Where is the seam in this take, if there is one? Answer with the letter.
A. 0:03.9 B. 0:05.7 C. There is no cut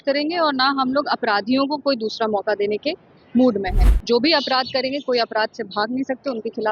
A